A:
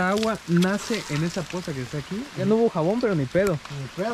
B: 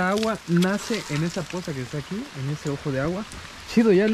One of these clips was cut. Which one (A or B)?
A